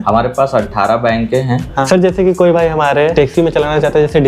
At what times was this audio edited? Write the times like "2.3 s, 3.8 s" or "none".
1.9 s, 3.1 s